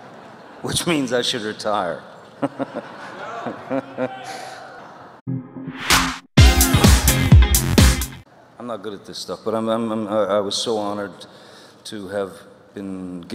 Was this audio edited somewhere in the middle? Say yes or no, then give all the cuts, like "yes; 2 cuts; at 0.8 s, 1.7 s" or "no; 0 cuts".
no; 0 cuts